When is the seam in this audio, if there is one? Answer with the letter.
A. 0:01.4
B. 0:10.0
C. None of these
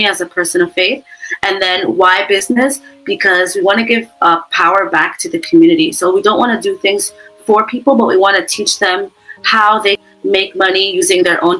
B